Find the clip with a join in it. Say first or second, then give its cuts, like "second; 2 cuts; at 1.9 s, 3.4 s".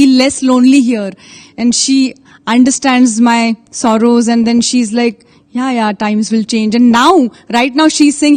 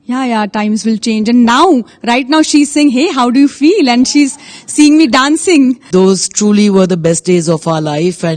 second; 1 cut; at 5.8 s